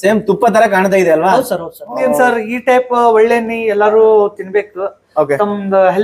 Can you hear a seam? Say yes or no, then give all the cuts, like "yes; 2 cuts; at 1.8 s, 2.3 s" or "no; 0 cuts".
yes; 1 cut; at 2.0 s